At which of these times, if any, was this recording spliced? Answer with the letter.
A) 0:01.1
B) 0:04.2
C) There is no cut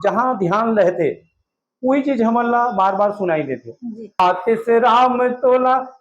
B